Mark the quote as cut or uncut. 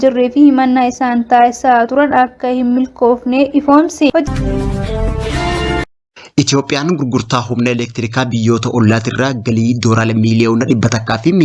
cut